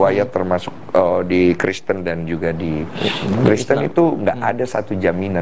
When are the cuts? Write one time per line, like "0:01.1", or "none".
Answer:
0:02.7